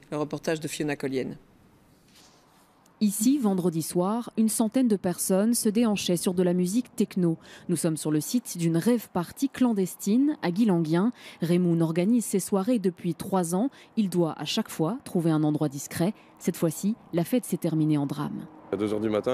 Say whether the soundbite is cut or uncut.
cut